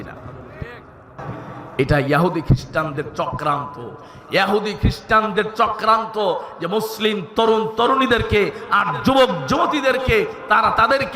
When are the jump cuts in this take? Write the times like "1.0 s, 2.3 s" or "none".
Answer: 1.1 s